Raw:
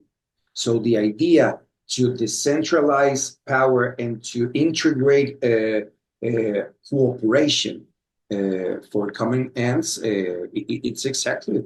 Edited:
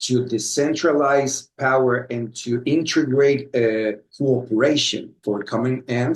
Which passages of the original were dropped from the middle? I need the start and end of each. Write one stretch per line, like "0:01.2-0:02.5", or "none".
0:06.0-0:06.8
0:07.9-0:08.8